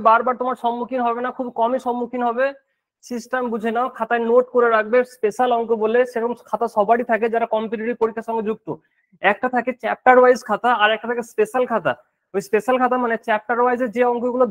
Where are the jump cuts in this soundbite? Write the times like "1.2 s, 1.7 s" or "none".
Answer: none